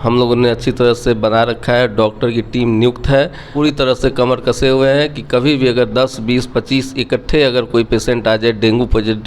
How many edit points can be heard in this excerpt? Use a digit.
1